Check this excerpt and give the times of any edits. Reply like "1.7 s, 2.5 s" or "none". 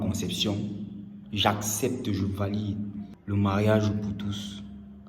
3.1 s